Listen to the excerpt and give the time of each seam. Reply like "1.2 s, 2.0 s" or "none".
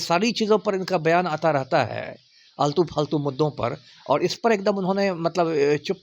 none